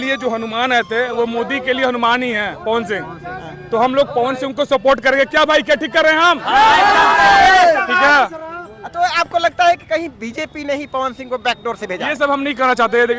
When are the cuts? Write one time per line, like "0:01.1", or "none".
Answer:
none